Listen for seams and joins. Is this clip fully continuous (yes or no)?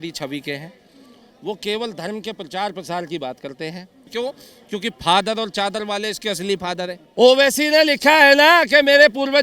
no